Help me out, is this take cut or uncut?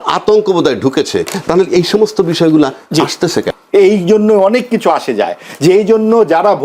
cut